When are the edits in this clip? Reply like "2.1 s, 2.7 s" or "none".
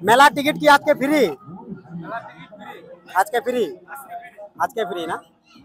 none